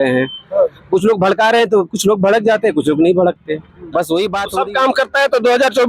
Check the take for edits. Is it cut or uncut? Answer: cut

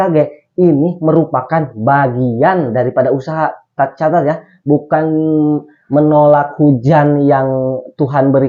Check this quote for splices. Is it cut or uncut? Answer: uncut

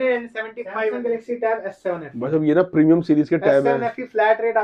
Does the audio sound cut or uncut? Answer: cut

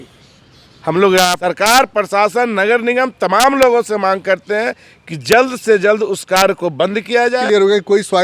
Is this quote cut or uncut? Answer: cut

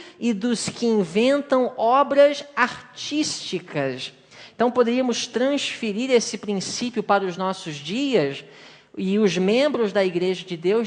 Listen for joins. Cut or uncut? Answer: cut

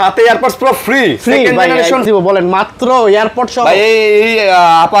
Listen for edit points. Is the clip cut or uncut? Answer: cut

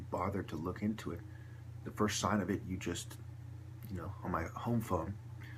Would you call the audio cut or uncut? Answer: uncut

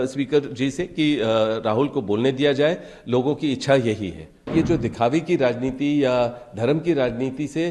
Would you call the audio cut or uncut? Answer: cut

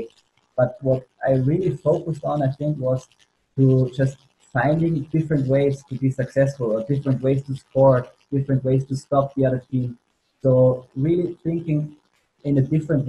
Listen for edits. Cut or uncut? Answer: uncut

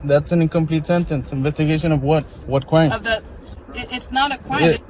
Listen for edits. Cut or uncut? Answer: cut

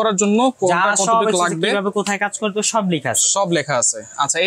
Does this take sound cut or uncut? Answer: uncut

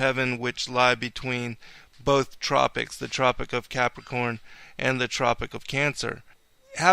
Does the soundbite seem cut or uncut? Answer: cut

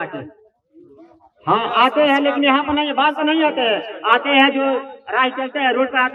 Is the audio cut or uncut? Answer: uncut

